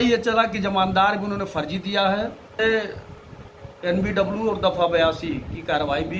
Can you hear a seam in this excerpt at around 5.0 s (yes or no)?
no